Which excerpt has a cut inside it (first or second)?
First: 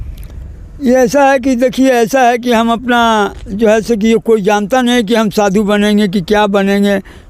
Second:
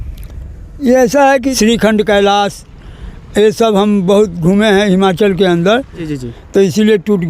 second